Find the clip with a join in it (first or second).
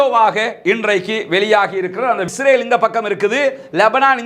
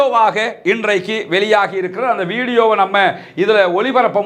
first